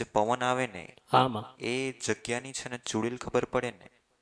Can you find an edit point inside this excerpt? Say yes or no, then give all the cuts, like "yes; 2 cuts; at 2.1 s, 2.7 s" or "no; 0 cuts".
no; 0 cuts